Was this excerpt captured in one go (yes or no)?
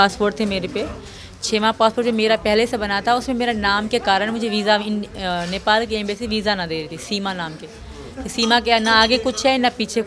yes